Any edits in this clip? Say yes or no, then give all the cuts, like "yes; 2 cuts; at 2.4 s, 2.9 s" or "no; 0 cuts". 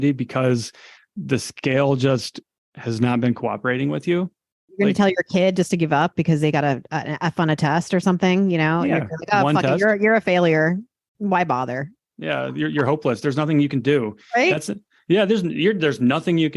yes; 2 cuts; at 4.5 s, 12.1 s